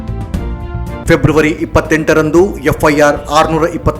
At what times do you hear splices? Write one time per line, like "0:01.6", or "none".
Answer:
0:01.0

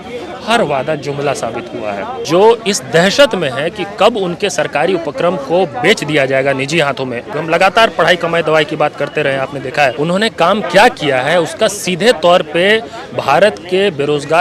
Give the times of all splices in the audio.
0:02.2
0:07.3
0:10.0

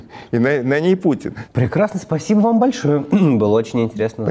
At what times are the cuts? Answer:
none

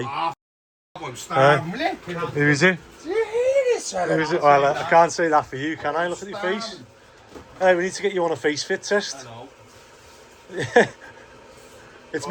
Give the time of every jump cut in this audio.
none

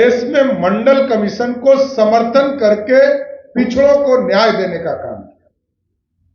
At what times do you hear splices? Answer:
none

